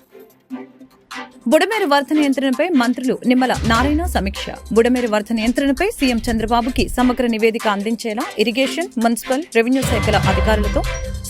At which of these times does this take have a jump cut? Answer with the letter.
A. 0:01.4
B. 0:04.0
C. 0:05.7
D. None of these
A